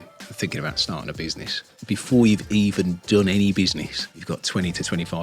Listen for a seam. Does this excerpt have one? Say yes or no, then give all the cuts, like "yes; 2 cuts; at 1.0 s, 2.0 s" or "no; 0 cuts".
yes; 2 cuts; at 1.7 s, 4.0 s